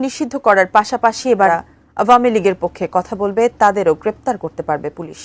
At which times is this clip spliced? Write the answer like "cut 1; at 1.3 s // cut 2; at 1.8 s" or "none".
cut 1; at 1.5 s